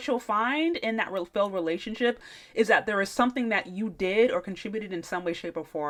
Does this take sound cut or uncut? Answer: uncut